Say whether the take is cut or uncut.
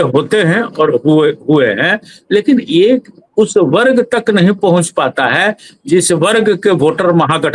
uncut